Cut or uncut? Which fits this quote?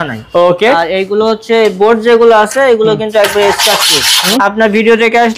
cut